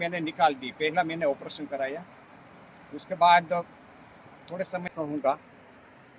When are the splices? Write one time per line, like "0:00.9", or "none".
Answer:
0:05.0